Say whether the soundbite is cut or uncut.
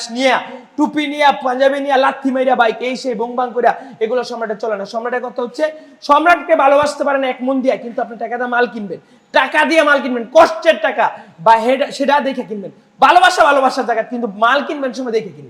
uncut